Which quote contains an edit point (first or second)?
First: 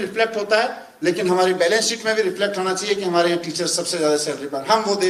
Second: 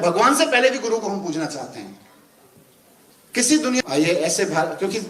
second